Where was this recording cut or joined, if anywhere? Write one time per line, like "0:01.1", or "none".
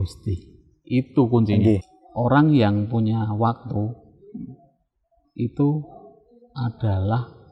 0:01.8